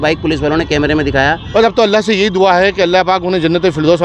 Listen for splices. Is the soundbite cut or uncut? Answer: cut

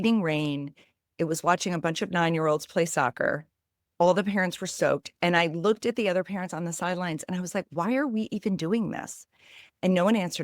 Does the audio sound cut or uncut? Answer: cut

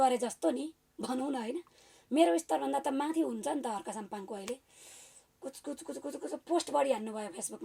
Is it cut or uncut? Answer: uncut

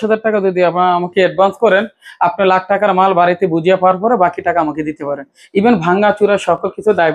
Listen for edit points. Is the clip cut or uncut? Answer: uncut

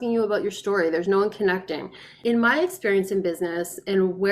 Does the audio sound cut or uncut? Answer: cut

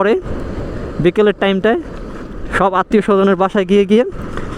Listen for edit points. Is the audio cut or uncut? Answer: uncut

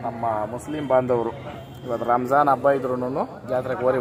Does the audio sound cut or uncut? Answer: uncut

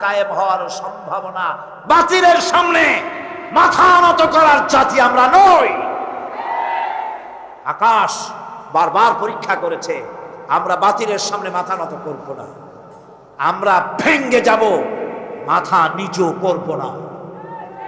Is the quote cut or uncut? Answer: cut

